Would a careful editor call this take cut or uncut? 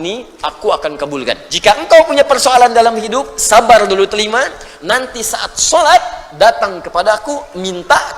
cut